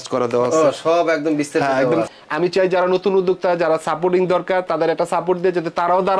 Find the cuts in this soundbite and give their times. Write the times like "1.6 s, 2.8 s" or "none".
2.1 s